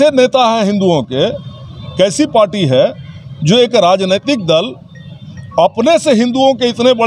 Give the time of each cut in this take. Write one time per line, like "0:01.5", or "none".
none